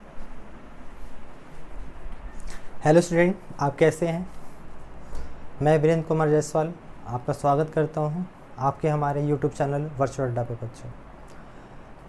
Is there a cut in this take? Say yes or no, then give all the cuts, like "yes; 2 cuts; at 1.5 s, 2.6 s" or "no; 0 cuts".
yes; 1 cut; at 1.0 s